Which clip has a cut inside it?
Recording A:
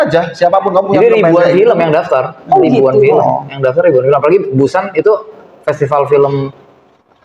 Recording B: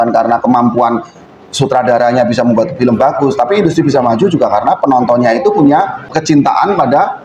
B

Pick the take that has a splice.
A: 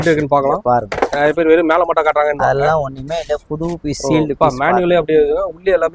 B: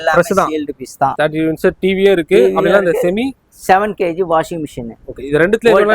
B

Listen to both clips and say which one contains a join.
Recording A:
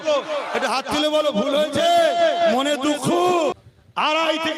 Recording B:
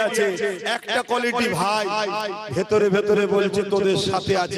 A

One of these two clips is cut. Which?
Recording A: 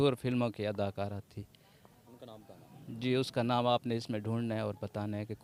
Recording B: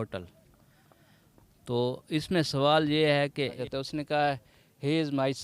B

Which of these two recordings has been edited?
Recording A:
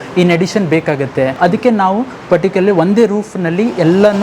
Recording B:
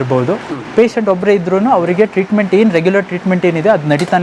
A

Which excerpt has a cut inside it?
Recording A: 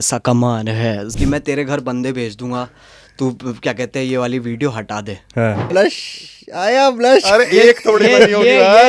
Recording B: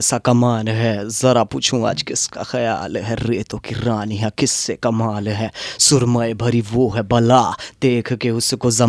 A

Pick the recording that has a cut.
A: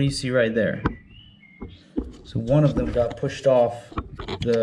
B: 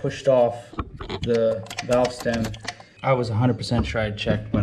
B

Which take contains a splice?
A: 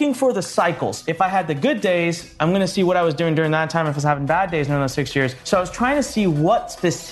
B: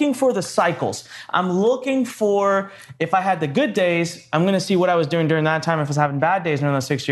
A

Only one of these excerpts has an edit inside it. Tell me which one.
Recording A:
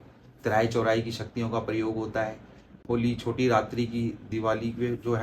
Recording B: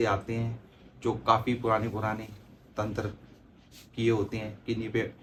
A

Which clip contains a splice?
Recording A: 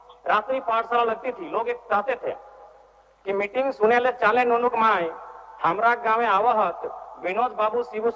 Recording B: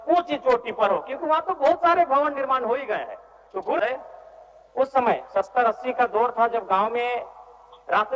B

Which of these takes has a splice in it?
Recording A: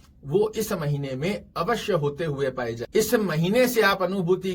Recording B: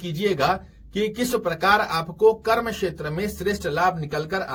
A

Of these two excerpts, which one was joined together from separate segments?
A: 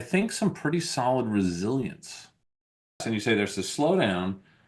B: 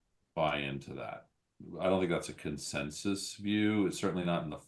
A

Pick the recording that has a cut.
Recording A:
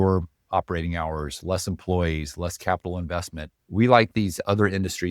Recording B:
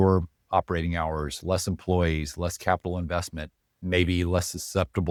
A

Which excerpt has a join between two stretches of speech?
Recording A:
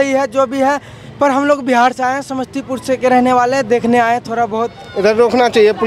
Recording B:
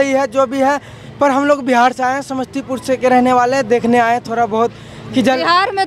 A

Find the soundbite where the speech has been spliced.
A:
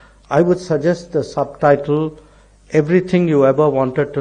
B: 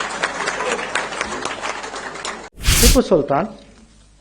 B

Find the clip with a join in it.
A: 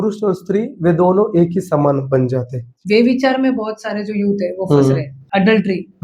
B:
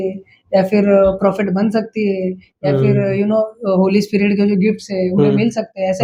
A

